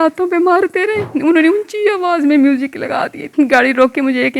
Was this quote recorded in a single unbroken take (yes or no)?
no